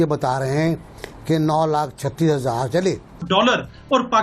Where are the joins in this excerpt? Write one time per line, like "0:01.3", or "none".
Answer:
0:03.2